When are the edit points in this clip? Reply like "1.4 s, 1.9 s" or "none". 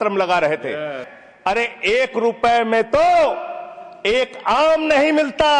1.0 s

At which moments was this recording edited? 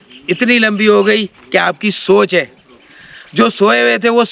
none

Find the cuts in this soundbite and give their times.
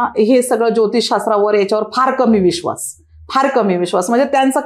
none

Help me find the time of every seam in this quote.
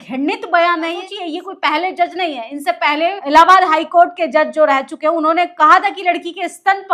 1.1 s, 3.2 s

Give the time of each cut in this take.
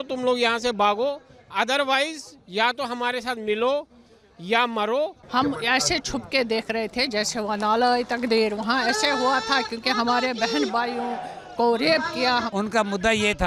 5.2 s, 12.5 s

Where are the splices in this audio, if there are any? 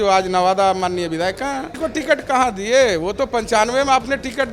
1.8 s

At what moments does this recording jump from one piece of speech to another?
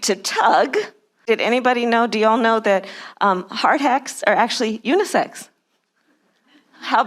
1.1 s

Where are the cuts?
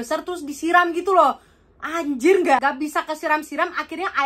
2.6 s

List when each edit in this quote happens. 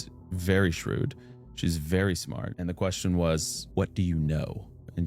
2.5 s

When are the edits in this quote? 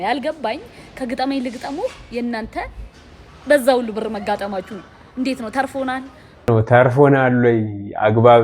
6.5 s

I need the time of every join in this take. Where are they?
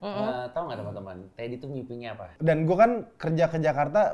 2.3 s

